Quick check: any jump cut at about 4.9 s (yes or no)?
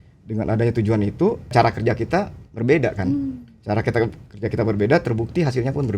no